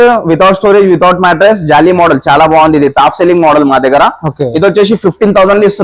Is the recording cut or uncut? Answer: uncut